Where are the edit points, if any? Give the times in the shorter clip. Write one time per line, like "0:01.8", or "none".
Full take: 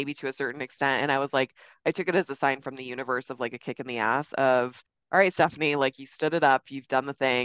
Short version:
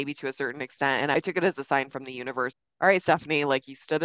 0:01.1
0:02.6